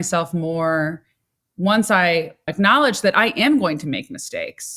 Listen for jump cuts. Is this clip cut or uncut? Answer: cut